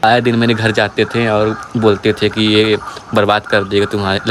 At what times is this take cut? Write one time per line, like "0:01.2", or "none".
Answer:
none